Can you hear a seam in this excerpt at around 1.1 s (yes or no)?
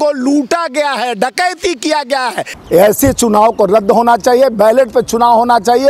no